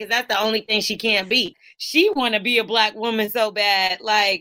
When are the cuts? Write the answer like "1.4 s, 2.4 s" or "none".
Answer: 1.5 s